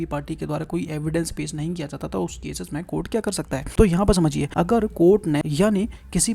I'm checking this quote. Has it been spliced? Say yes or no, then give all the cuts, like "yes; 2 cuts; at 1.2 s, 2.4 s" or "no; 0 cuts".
yes; 3 cuts; at 3.7 s, 4.4 s, 5.4 s